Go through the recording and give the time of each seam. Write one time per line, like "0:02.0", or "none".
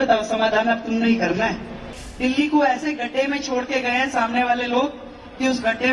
0:02.0